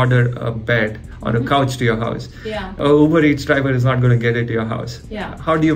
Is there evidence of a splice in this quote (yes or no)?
no